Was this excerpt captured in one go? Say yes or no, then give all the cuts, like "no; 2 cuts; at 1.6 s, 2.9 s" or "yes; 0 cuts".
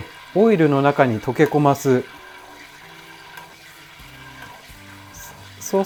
yes; 0 cuts